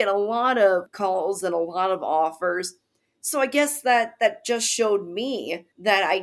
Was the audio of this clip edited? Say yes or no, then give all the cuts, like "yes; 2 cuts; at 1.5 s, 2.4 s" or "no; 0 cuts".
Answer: yes; 1 cut; at 0.9 s